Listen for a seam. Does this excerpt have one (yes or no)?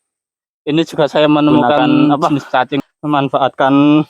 yes